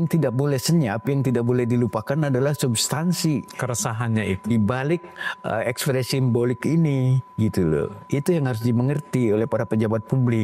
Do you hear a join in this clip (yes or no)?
no